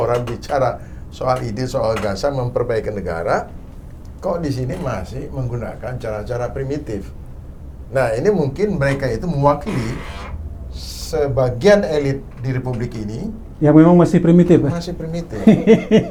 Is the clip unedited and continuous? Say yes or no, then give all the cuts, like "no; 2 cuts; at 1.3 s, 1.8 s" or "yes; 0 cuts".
yes; 0 cuts